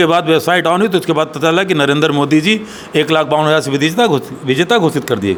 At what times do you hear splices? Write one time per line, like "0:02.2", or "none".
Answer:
none